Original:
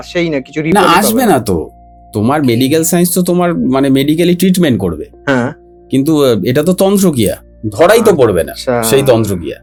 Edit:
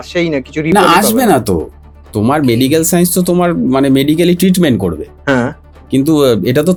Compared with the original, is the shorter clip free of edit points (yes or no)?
yes